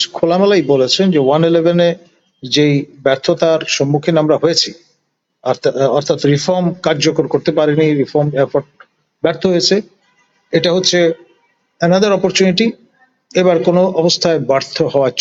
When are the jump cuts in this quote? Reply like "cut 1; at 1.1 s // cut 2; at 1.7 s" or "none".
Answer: none